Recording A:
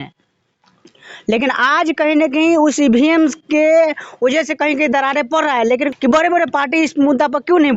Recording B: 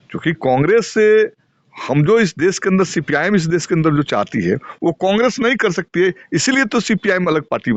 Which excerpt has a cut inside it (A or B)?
A